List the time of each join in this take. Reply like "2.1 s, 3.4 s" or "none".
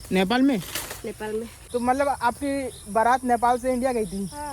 1.6 s